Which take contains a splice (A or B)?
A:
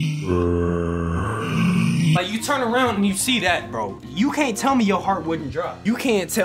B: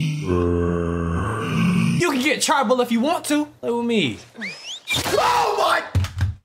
B